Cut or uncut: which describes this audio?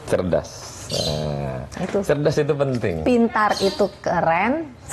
uncut